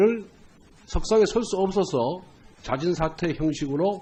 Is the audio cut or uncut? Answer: uncut